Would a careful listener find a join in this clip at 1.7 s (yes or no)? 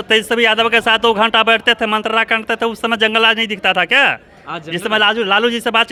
no